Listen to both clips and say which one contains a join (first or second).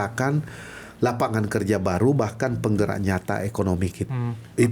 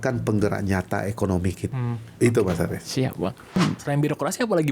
second